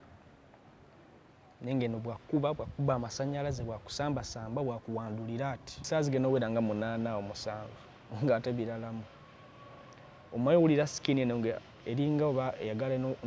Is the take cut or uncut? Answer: cut